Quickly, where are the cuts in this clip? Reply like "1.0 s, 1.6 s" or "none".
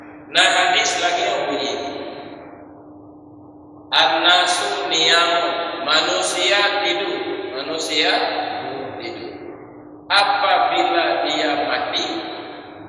none